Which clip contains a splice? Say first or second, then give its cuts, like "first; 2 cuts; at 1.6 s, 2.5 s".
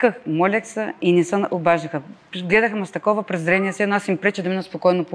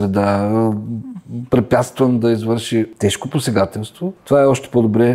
second; 2 cuts; at 2.9 s, 4.2 s